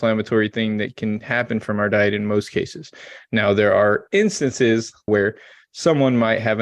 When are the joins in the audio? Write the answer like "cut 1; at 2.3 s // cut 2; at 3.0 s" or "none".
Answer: cut 1; at 5.1 s